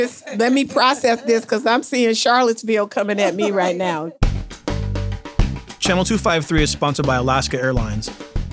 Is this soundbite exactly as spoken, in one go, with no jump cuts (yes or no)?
no